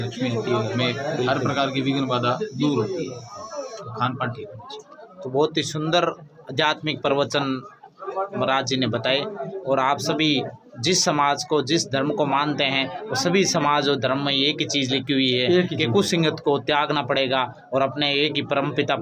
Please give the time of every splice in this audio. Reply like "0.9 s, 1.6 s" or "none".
none